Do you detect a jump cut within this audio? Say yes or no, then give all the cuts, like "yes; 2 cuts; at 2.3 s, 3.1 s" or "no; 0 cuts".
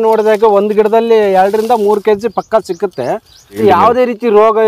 yes; 1 cut; at 3.6 s